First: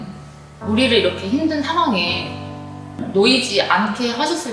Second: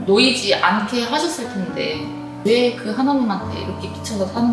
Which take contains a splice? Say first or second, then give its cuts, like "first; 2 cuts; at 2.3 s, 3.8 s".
second; 1 cut; at 2.4 s